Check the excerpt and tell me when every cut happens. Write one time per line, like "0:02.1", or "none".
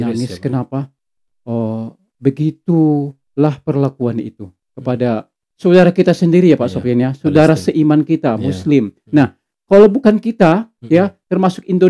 none